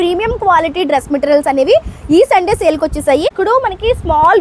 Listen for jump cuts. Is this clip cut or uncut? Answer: cut